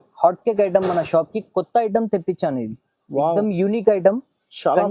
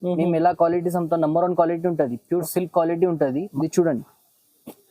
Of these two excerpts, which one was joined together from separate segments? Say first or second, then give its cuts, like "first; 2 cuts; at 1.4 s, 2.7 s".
second; 1 cut; at 3.4 s